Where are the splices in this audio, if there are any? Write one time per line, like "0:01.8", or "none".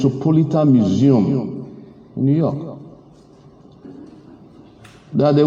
0:03.8